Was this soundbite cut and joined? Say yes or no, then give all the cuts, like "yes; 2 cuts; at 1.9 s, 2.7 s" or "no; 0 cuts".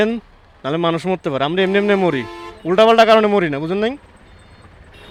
no; 0 cuts